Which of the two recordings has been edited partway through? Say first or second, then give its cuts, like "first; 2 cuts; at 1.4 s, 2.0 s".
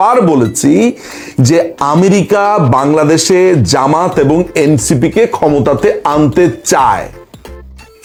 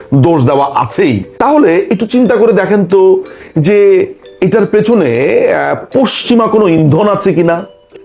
second; 1 cut; at 1.3 s